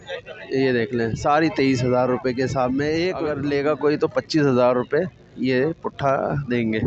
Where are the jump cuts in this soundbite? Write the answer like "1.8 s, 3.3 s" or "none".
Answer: 3.4 s

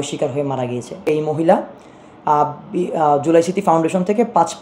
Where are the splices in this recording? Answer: 1.0 s

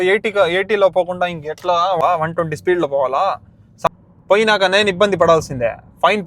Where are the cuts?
2.0 s, 3.5 s

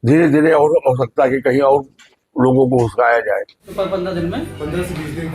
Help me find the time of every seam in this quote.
3.6 s

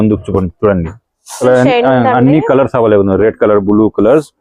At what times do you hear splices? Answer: 1.4 s

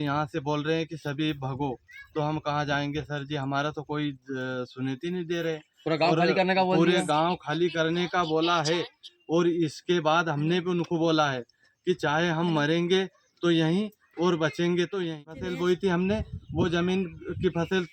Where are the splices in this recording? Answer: 15.5 s

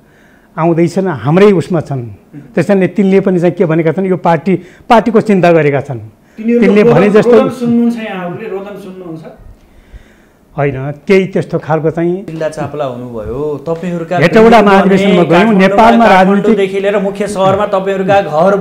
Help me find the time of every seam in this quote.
12.3 s

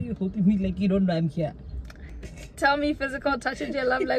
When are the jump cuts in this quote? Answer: 2.0 s

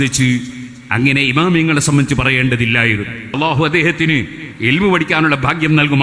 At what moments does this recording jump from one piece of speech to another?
3.3 s

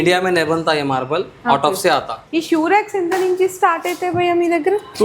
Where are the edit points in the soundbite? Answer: 2.3 s

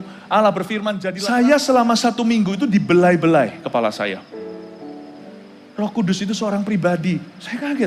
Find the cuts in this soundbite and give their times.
1.1 s, 5.1 s

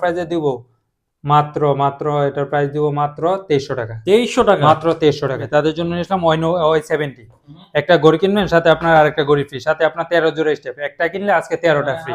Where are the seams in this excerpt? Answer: 5.4 s

